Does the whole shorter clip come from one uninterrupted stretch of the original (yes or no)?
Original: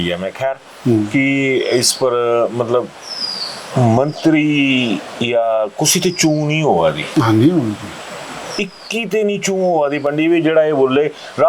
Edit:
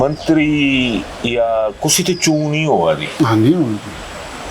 yes